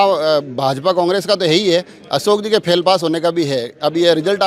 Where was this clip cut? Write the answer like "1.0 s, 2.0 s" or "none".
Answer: none